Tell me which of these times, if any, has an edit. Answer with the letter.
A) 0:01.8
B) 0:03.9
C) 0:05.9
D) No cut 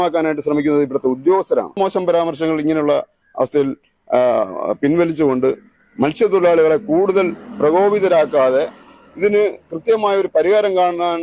A